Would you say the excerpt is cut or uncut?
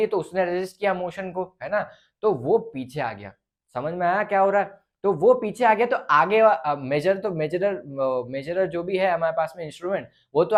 uncut